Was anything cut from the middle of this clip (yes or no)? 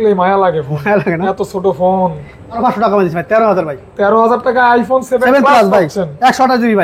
yes